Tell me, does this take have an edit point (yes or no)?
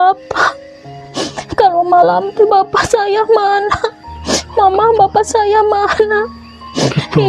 no